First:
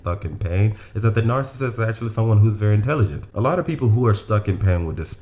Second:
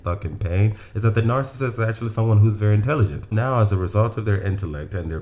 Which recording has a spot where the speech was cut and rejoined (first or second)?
second